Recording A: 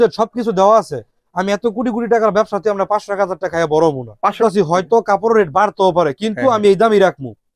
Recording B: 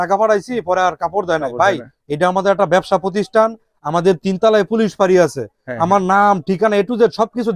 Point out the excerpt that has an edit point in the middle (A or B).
A